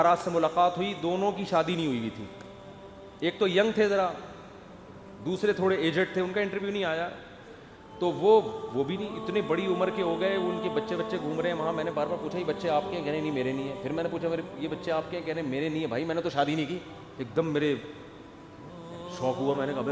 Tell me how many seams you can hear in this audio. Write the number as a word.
zero